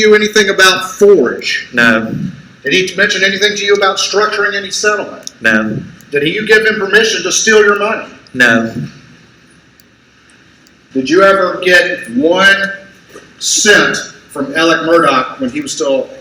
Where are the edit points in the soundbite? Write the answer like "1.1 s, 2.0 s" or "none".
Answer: 10.7 s